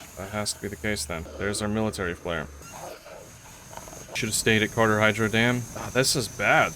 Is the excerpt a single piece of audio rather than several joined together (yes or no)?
no